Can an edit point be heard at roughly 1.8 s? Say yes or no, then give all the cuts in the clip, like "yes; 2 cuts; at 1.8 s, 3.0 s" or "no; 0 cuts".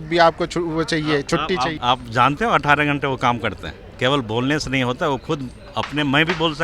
yes; 1 cut; at 1.8 s